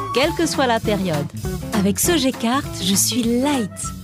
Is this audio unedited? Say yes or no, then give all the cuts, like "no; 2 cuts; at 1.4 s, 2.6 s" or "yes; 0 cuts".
yes; 0 cuts